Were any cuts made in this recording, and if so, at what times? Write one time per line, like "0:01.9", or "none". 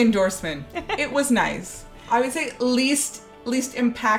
0:02.1